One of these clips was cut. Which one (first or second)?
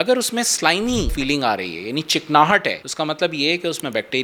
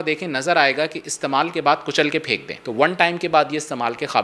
second